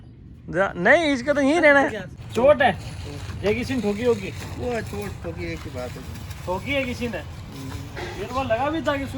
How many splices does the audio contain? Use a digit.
1